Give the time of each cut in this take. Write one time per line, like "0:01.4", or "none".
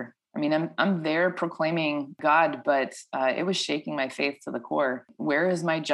0:02.2
0:05.1